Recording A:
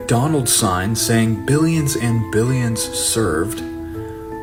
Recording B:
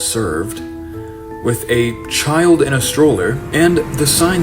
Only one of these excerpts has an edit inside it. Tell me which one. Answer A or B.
B